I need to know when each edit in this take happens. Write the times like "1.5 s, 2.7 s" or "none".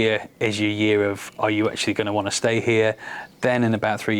none